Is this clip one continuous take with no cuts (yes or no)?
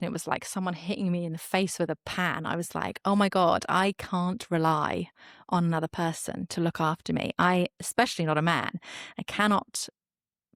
yes